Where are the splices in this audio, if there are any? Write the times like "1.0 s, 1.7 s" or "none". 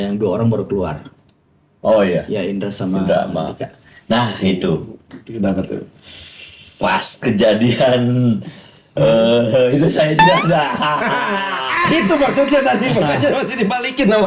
none